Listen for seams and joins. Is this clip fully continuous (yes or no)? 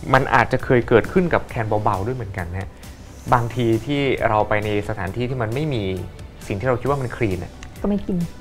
yes